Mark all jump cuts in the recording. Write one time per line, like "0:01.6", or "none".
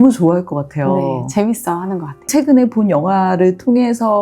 0:02.2